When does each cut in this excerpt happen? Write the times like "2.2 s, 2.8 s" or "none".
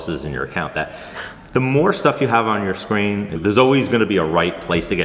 3.4 s